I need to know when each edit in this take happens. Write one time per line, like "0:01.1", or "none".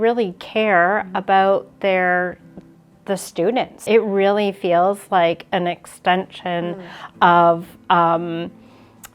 0:03.8